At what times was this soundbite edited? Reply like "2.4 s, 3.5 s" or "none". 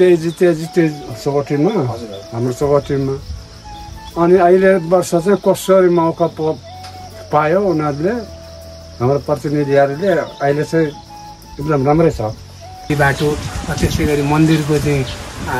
12.9 s